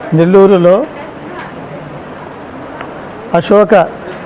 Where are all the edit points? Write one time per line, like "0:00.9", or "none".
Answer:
0:00.9